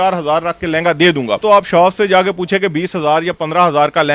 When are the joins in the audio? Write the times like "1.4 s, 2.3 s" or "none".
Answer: 1.4 s